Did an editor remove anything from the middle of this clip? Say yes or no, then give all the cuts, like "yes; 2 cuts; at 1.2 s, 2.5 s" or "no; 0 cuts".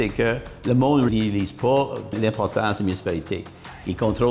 yes; 2 cuts; at 1.1 s, 2.2 s